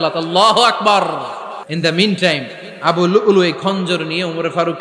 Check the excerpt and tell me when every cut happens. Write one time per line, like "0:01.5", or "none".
0:01.6